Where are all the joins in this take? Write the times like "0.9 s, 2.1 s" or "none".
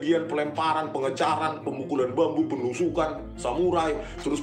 none